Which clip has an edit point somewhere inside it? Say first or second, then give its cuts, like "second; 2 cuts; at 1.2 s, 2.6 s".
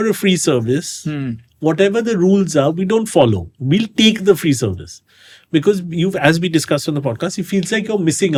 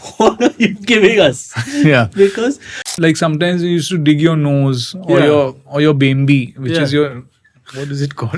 second; 1 cut; at 2.9 s